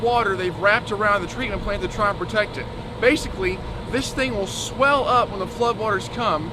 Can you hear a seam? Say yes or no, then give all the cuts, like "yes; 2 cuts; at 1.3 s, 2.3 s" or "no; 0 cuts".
no; 0 cuts